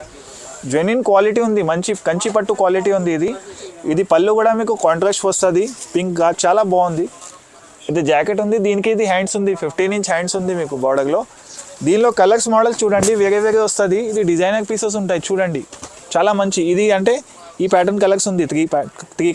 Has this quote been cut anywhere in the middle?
no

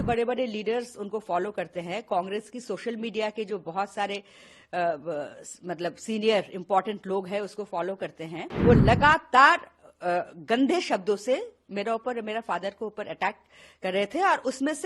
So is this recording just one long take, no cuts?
no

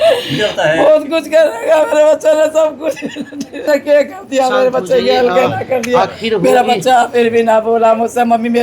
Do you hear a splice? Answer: yes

